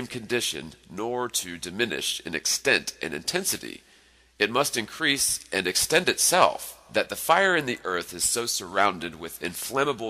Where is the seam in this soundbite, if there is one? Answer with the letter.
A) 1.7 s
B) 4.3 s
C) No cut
C